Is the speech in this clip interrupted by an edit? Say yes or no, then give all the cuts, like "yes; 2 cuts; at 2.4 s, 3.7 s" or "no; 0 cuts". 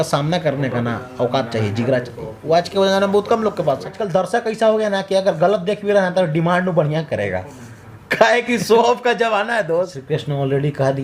yes; 2 cuts; at 4.0 s, 10.0 s